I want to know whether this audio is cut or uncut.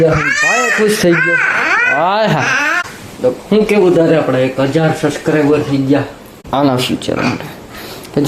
cut